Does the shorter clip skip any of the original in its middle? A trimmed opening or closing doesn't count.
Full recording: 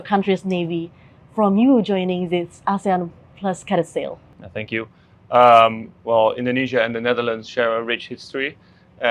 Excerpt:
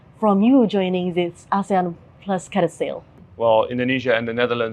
yes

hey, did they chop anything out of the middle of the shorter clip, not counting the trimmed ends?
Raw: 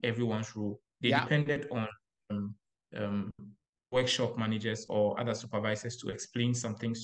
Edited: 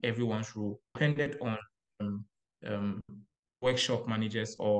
yes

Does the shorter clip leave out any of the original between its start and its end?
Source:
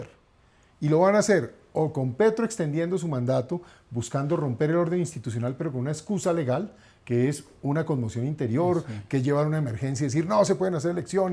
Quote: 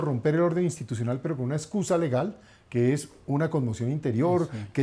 no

